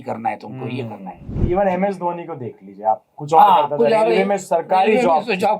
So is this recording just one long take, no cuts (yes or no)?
no